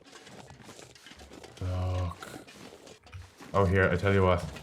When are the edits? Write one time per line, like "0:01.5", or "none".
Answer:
0:03.0

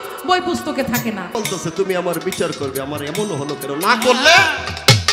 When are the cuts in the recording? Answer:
0:01.3

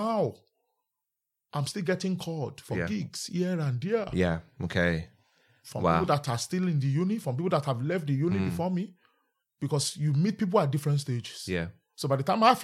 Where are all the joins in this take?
none

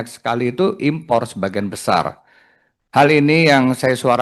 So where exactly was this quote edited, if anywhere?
none

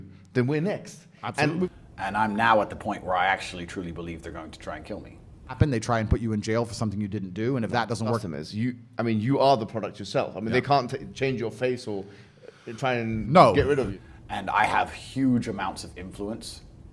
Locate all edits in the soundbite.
0:01.6
0:05.6
0:08.3
0:13.9

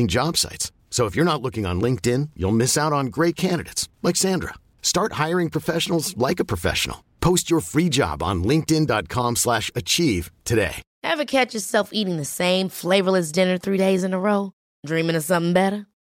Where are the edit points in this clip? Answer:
0:10.8

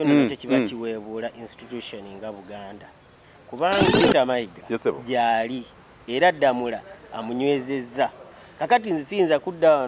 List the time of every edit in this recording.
0:03.9

